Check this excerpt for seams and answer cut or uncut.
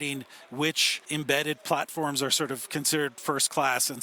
cut